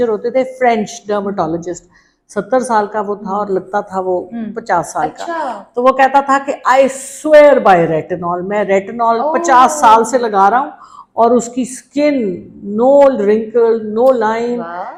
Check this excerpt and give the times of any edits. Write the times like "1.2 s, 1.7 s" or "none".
none